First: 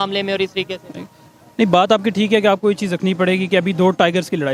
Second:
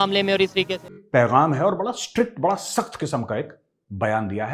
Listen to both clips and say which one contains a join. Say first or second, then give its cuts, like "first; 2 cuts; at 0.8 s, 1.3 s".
second; 1 cut; at 1.0 s